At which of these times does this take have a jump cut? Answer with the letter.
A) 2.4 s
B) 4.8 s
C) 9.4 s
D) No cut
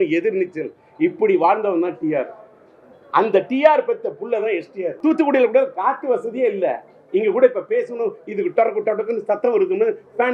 B